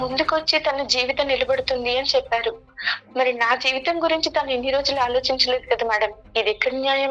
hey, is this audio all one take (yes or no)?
yes